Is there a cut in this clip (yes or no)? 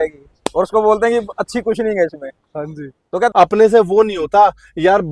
yes